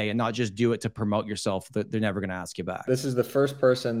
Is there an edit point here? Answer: yes; 1 cut; at 2.9 s

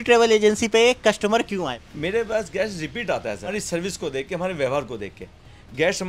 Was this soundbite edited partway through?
yes; 2 cuts; at 1.8 s, 3.5 s

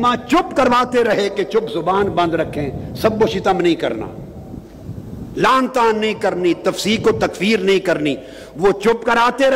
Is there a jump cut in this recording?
no; 0 cuts

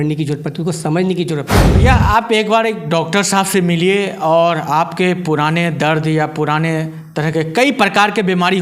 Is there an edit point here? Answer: yes; 1 cut; at 1.7 s

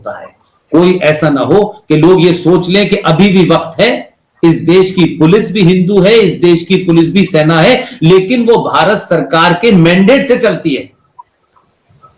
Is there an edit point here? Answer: no; 0 cuts

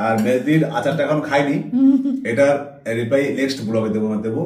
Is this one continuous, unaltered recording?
yes; 0 cuts

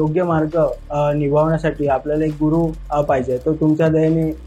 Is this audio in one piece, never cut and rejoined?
yes; 0 cuts

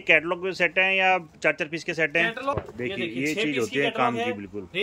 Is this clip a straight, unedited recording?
no; 1 cut; at 2.5 s

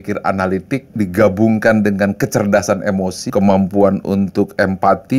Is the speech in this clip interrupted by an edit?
yes; 2 cuts; at 0.9 s, 3.3 s

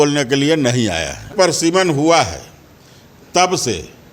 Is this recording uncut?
no; 1 cut; at 1.3 s

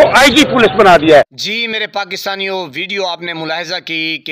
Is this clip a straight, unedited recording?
yes; 0 cuts

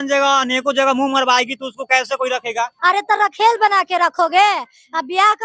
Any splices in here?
yes; 1 cut; at 2.7 s

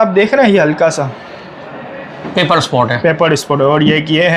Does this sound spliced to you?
no; 0 cuts

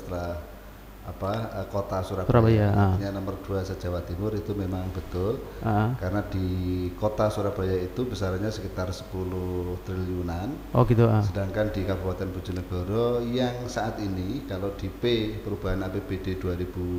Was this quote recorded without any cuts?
yes; 0 cuts

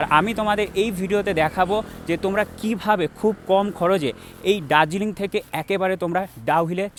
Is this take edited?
no; 0 cuts

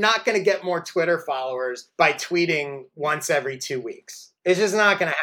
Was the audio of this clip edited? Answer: no; 0 cuts

